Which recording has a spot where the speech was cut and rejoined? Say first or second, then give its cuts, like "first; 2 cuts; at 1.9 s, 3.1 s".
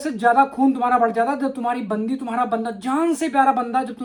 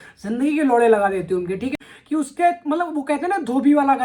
second; 1 cut; at 1.8 s